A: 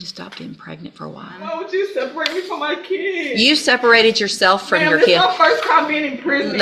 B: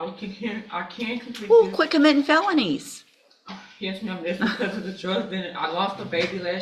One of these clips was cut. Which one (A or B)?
A